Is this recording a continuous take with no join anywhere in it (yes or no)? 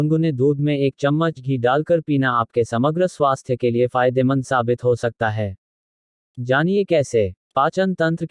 no